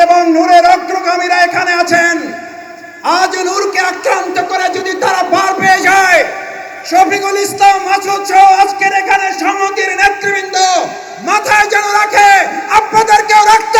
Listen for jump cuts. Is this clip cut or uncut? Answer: uncut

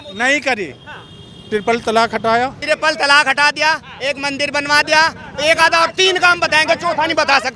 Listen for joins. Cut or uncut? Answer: cut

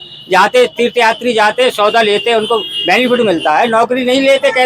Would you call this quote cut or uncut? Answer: uncut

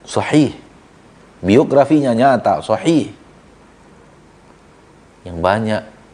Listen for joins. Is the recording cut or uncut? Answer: cut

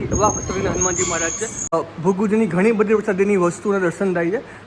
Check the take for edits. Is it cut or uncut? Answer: cut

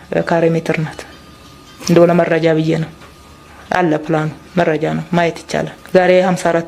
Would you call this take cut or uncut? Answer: cut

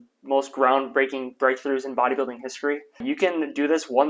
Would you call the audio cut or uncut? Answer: cut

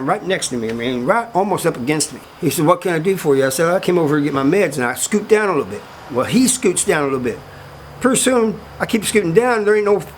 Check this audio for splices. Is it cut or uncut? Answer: cut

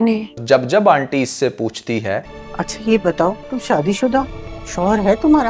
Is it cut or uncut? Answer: cut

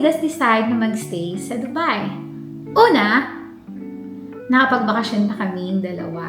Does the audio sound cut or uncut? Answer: uncut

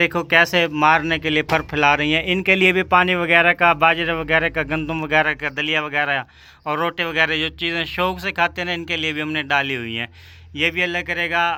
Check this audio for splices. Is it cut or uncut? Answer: uncut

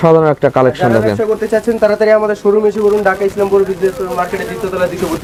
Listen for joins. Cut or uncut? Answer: uncut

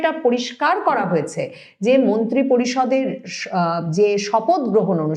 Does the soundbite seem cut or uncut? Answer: uncut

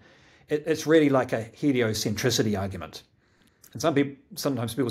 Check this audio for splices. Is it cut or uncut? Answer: uncut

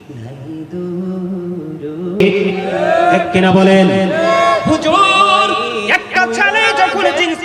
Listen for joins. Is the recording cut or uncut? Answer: cut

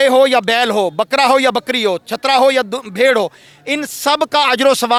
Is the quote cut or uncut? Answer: uncut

